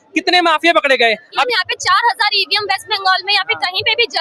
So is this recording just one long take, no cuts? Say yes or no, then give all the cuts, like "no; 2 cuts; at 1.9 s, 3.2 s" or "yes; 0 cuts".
no; 1 cut; at 1.4 s